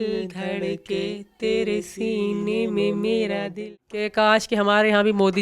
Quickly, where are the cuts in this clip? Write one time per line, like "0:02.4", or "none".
0:03.6